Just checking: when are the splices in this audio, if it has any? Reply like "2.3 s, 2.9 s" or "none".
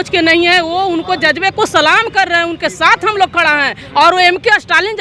none